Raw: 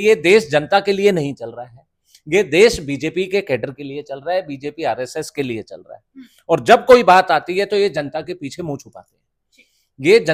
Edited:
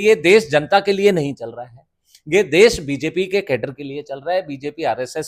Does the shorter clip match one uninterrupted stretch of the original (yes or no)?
yes